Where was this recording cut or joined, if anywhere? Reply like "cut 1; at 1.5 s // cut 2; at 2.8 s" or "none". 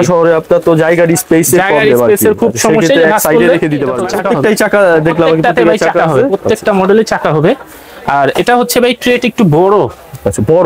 cut 1; at 4.0 s